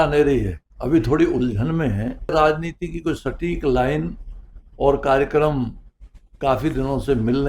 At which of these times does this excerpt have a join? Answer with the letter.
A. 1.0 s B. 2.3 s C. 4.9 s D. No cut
B